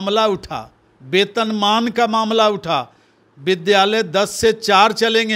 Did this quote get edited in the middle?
no; 0 cuts

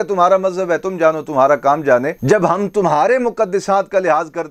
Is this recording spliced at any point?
no; 0 cuts

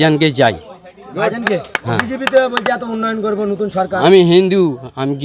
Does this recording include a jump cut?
no; 0 cuts

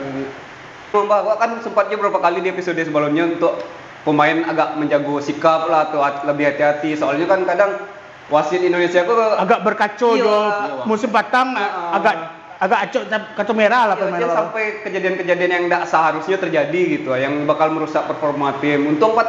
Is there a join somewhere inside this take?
yes; 1 cut; at 0.9 s

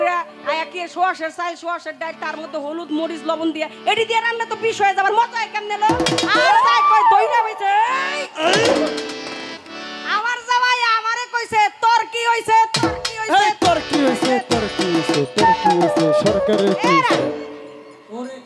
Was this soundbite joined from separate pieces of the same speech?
no; 0 cuts

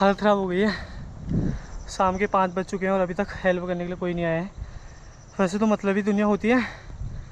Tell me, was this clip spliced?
no; 0 cuts

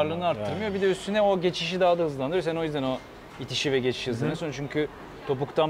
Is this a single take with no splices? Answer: yes; 0 cuts

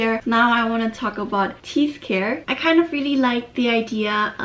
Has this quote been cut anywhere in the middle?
yes; 2 cuts; at 1.6 s, 2.5 s

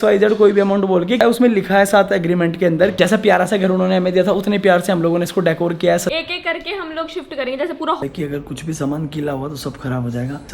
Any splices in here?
yes; 4 cuts; at 1.2 s, 2.9 s, 6.1 s, 8.0 s

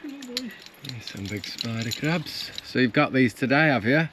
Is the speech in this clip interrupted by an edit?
no; 0 cuts

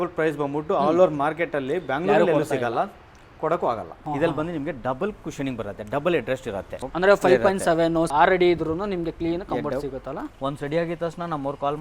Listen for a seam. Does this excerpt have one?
yes; 3 cuts; at 4.0 s, 6.8 s, 10.3 s

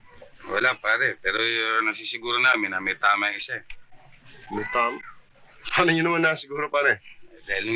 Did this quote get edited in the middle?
no; 0 cuts

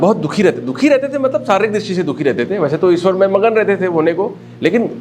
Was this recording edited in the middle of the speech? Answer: no; 0 cuts

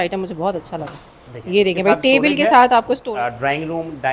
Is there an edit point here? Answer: yes; 1 cut; at 3.1 s

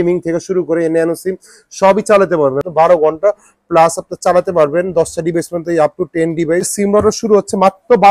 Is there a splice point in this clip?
yes; 2 cuts; at 2.6 s, 6.7 s

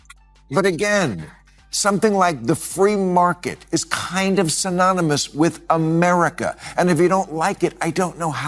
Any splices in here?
no; 0 cuts

